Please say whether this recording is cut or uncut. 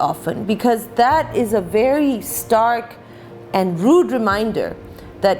uncut